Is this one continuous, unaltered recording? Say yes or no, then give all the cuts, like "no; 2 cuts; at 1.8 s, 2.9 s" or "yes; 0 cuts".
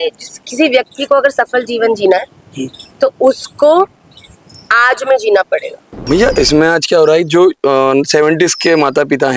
no; 1 cut; at 5.9 s